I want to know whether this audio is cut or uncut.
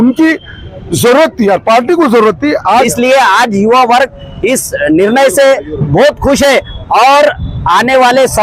cut